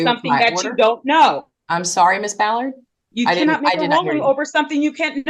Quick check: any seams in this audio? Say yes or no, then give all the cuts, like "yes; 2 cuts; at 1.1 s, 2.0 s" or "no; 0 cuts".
no; 0 cuts